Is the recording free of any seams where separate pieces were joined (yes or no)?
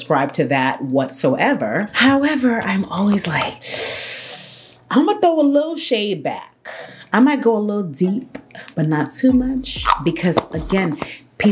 yes